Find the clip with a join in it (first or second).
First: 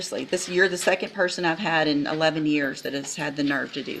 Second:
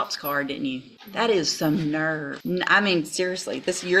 second